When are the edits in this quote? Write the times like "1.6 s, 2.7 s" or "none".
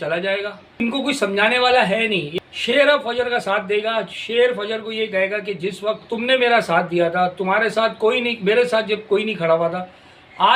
0.8 s, 2.3 s